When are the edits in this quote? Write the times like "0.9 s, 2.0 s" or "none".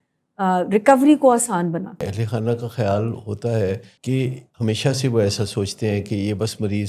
2.0 s, 4.2 s